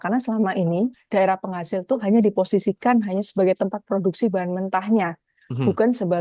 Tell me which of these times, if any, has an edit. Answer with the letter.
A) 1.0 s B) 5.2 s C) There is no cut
A